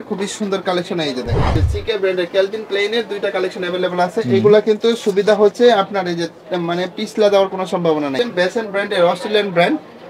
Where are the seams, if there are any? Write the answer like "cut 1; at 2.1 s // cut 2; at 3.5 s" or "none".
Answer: cut 1; at 1.6 s // cut 2; at 8.1 s